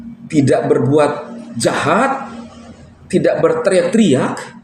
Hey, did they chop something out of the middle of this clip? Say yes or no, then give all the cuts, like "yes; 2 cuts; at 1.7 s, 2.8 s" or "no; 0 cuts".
no; 0 cuts